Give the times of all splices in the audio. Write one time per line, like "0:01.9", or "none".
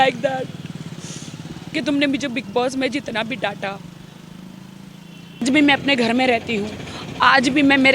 0:05.4

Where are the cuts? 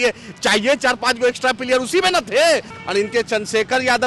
0:02.7

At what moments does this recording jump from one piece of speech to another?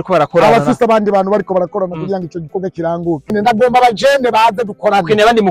0:03.3

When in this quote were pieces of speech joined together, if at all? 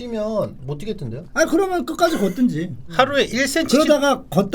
0:01.2
0:02.8

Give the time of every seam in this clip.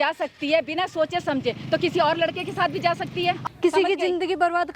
0:03.4

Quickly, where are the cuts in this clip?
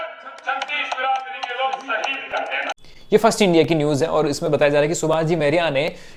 none

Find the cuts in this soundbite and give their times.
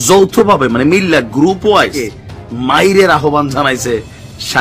0:02.1

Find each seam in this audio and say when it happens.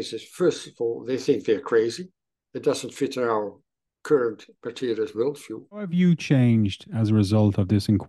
0:05.9

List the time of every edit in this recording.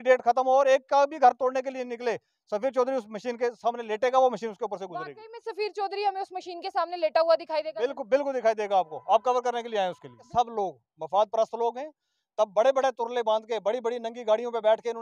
0:10.2

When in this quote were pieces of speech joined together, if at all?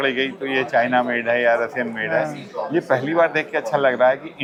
none

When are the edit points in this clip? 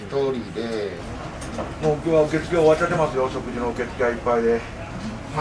0:01.0

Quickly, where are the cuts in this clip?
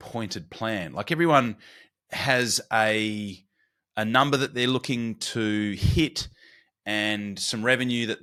none

